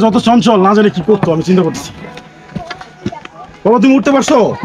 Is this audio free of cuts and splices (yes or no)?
yes